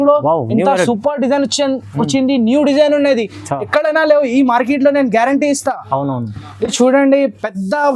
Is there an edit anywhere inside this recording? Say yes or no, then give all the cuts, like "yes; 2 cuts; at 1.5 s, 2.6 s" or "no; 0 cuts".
yes; 1 cut; at 6.5 s